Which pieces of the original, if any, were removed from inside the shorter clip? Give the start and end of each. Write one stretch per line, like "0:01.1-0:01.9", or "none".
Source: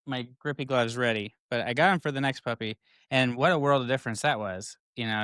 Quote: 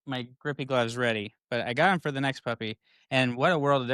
none